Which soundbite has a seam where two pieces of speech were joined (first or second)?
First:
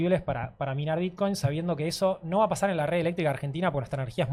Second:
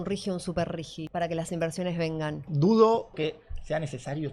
second